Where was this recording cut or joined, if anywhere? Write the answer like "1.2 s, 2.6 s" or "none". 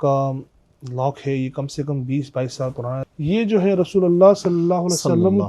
3.0 s